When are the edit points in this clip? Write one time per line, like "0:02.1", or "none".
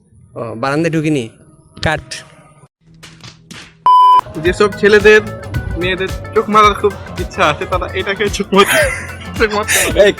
0:04.3